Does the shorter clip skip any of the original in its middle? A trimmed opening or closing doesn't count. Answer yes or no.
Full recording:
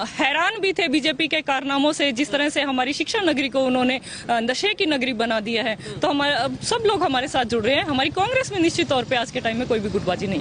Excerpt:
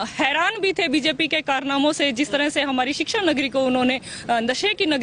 no